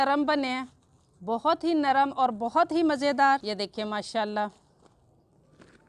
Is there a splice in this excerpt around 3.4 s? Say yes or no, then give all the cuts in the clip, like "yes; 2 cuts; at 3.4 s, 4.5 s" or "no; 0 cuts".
yes; 1 cut; at 3.4 s